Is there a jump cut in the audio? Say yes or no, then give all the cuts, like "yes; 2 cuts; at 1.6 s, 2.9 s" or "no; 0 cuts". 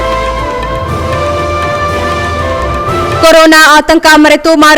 yes; 1 cut; at 3.2 s